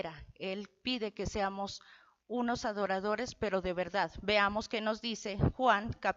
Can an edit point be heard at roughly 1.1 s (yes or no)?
no